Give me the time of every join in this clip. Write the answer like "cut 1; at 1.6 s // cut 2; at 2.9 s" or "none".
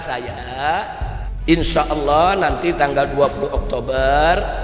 cut 1; at 1.5 s